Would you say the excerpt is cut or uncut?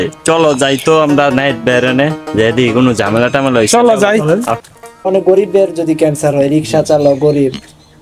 cut